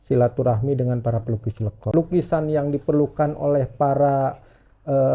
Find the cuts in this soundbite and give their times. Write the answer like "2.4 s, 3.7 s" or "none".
1.9 s